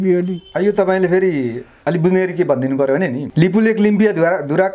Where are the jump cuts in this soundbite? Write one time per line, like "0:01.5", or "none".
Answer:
0:03.2